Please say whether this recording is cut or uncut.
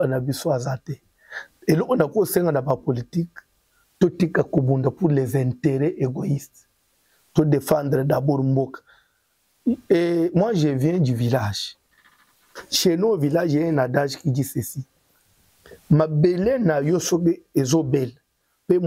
uncut